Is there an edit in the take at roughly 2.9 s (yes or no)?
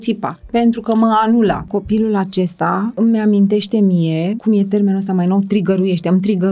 yes